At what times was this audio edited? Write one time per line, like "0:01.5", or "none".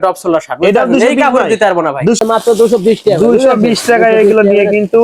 0:02.2